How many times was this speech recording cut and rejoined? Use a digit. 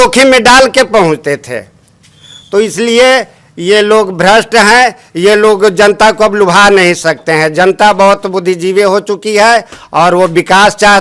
0